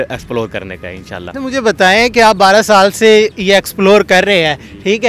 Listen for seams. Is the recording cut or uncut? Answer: uncut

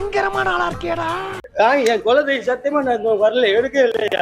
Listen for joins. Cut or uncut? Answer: cut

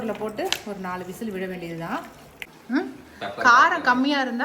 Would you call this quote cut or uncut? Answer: cut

